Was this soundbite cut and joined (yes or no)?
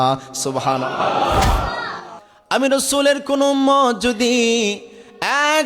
yes